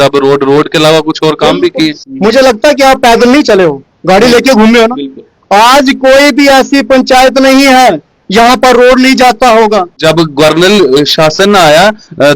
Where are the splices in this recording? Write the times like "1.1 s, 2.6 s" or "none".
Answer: 2.0 s, 10.0 s